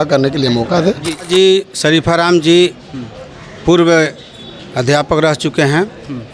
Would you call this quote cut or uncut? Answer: cut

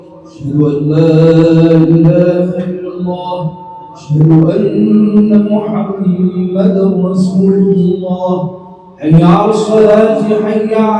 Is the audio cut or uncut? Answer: uncut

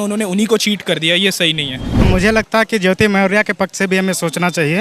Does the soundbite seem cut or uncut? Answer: cut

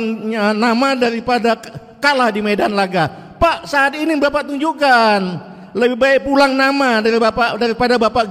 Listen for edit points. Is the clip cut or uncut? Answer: uncut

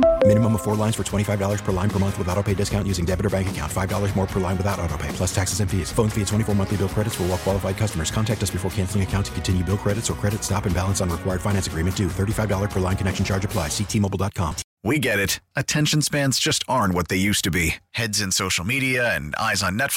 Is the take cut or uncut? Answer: cut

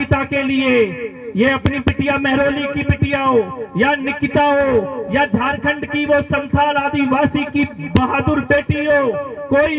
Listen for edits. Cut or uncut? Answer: uncut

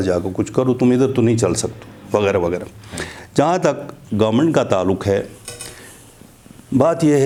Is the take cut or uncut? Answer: uncut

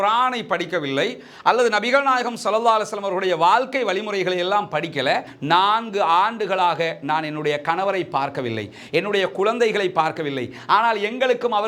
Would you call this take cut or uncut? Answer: cut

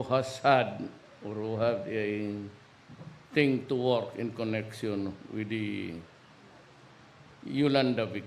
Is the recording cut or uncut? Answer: uncut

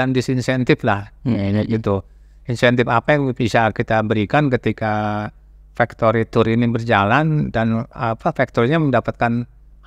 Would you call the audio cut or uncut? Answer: uncut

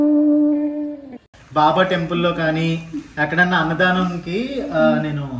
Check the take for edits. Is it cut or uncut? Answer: cut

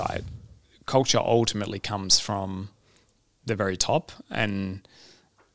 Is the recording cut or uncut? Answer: uncut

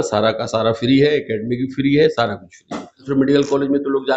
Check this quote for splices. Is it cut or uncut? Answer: cut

